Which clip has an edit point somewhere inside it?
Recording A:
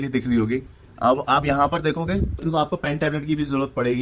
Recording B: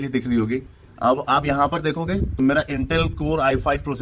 A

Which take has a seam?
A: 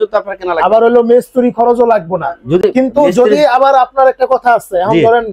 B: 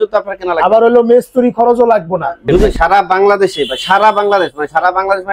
B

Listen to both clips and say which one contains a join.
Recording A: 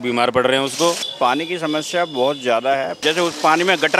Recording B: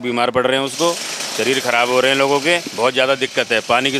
A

